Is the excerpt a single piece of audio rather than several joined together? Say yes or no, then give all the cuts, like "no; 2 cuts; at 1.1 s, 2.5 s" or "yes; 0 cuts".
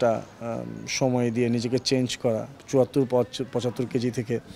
no; 1 cut; at 2.6 s